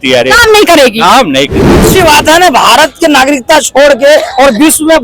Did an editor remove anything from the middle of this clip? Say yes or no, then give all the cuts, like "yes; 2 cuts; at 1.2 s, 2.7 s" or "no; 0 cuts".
yes; 1 cut; at 1.8 s